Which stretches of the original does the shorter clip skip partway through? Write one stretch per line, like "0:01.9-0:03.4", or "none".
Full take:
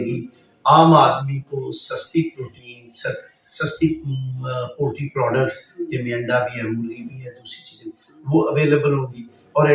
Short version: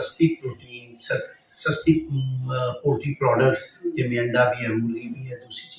none